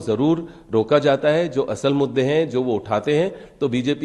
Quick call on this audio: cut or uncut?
uncut